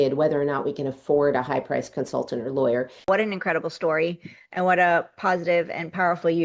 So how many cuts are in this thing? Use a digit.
1